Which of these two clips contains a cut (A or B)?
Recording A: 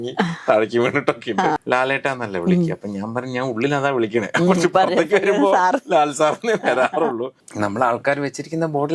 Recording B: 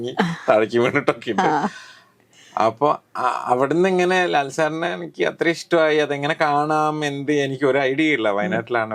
A